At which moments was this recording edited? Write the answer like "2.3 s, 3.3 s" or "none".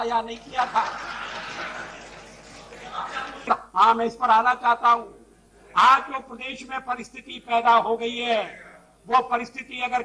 3.5 s

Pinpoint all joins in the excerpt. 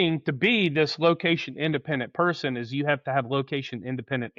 none

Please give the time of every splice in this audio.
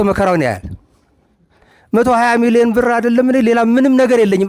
1.7 s

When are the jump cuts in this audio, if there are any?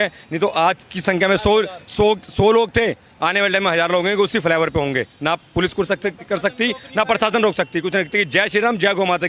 none

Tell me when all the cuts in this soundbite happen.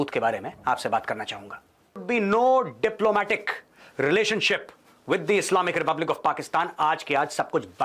2.0 s

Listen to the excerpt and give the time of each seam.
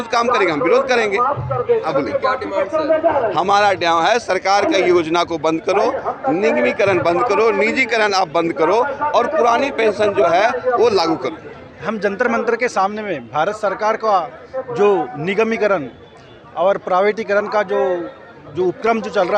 none

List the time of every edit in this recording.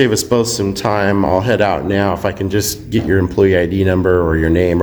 none

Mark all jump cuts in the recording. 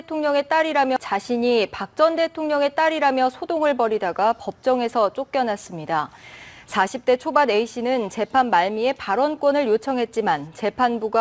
none

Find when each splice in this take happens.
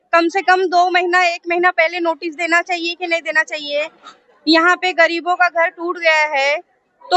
none

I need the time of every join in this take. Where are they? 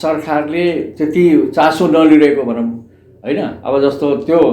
none

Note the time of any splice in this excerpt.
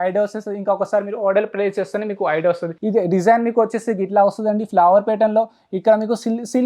2.7 s

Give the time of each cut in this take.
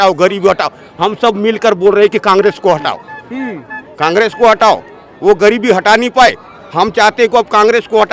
none

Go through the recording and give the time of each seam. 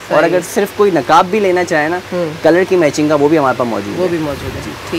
none

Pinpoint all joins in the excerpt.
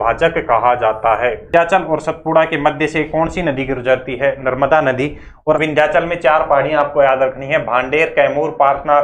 1.5 s, 5.6 s

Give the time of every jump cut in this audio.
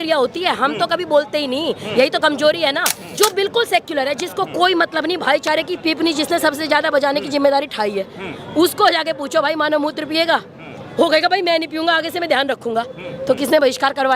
3.0 s

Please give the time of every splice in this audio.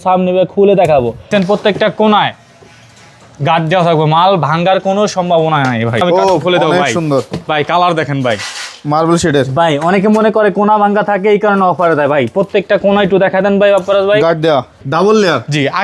1.2 s, 6.0 s, 14.8 s

